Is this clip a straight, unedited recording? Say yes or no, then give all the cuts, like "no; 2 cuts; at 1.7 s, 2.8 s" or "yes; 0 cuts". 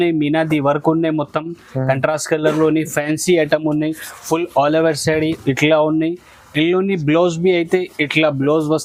yes; 0 cuts